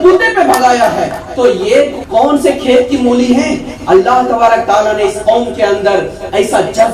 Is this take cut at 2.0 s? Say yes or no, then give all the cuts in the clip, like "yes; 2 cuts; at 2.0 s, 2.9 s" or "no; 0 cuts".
yes; 1 cut; at 2.0 s